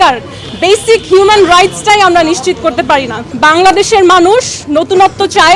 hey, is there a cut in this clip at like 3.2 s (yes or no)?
yes